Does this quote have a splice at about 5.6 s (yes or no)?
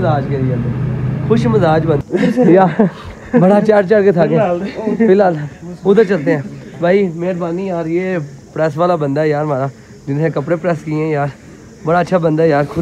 no